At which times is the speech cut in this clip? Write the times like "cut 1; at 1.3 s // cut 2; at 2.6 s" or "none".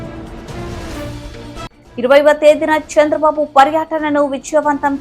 cut 1; at 1.2 s